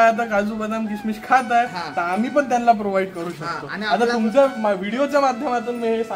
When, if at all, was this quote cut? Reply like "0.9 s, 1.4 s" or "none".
none